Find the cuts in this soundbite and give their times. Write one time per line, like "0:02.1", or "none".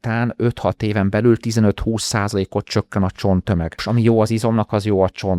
0:03.8